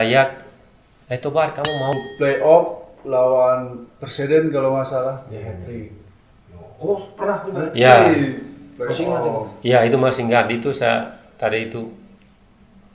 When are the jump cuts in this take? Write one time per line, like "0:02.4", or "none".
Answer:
0:01.9